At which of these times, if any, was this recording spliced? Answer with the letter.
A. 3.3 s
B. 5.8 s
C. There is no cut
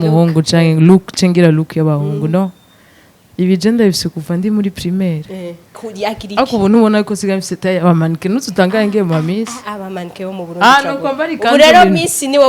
B